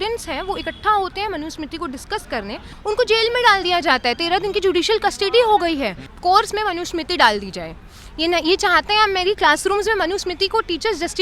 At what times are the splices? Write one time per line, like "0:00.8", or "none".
0:02.7
0:06.1